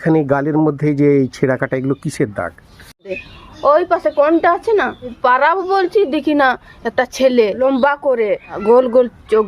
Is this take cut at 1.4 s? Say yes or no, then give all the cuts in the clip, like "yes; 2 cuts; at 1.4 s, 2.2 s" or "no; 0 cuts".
no; 4 cuts; at 3.2 s, 5.1 s, 7.6 s, 8.5 s